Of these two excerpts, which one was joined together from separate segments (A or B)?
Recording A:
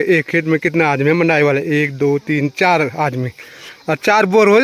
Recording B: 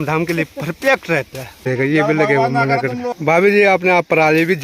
B